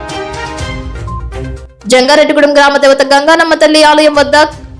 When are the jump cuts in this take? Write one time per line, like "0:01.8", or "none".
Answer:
0:01.2